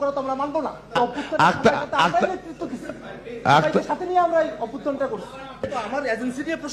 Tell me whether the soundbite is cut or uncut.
cut